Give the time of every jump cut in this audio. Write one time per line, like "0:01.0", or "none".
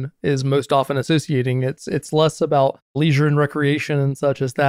0:03.0